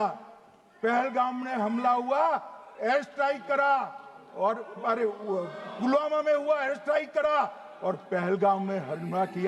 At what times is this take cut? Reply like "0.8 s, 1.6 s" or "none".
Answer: none